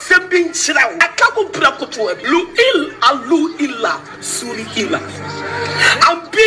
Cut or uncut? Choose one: cut